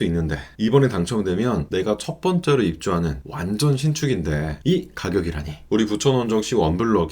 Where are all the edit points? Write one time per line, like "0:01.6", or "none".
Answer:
0:05.6